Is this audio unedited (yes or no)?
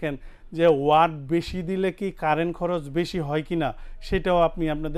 yes